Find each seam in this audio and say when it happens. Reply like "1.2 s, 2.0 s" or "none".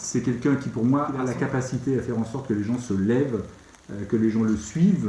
1.2 s